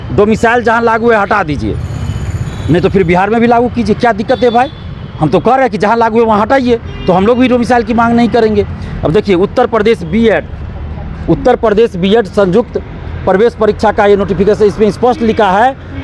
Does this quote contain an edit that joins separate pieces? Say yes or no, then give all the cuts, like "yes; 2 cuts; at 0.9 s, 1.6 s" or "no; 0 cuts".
no; 0 cuts